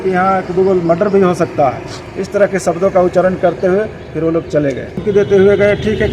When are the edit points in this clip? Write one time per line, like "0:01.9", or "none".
0:05.0